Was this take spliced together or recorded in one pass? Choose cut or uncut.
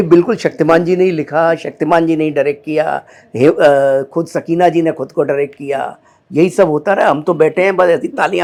uncut